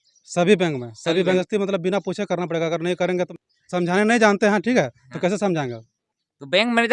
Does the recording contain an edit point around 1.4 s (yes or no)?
yes